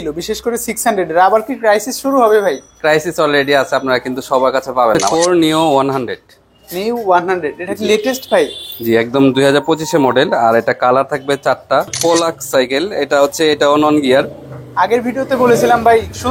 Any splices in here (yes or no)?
yes